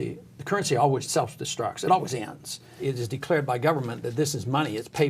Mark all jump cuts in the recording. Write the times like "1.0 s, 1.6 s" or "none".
1.1 s, 2.8 s